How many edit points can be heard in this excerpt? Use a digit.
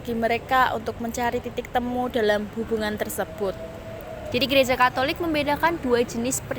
1